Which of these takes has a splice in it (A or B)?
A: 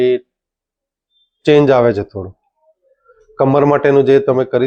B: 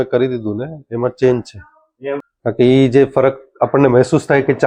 B